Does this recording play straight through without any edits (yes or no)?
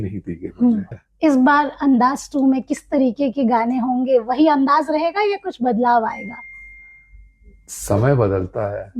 no